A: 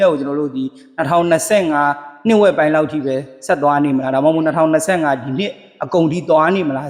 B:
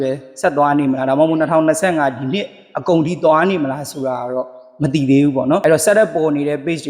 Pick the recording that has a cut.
B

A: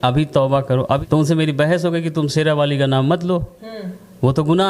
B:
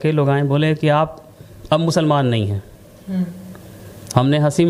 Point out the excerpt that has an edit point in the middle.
A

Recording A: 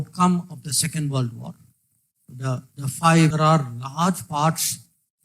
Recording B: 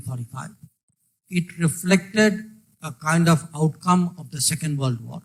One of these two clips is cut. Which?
A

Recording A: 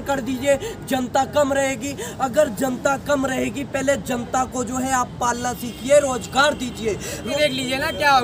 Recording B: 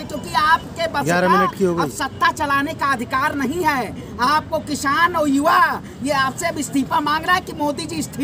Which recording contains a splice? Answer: A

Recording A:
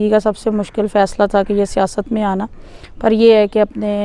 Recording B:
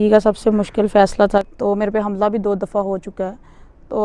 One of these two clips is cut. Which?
B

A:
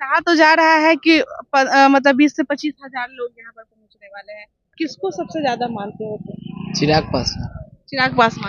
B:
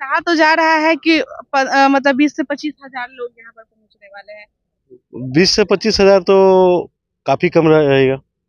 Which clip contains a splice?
A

